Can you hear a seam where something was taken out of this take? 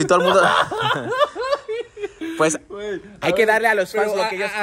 no; 0 cuts

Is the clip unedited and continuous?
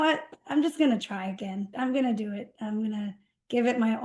no; 1 cut; at 1.7 s

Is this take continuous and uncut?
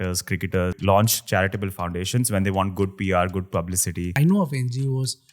no; 2 cuts; at 0.8 s, 4.1 s

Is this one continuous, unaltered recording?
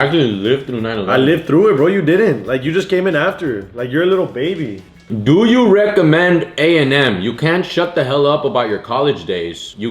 yes; 0 cuts

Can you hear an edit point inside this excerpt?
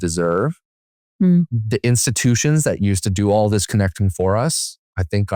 no; 0 cuts

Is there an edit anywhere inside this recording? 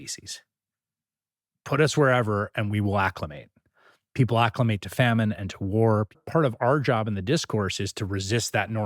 yes; 1 cut; at 6.2 s

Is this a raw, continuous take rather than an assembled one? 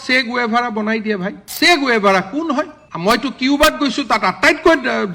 no; 2 cuts; at 1.4 s, 2.8 s

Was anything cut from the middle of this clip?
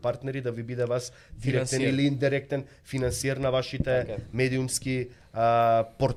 no; 0 cuts

